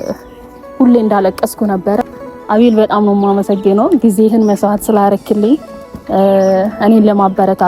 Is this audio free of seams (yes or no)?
no